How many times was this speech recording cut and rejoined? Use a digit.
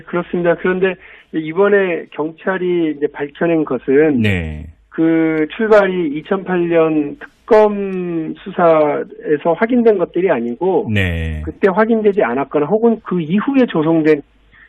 1